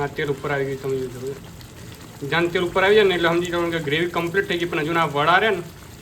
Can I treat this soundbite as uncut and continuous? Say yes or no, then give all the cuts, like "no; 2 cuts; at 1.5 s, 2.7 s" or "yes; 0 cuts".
yes; 0 cuts